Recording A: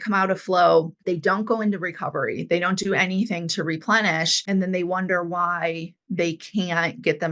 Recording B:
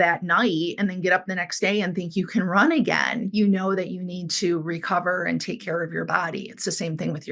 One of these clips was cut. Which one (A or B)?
A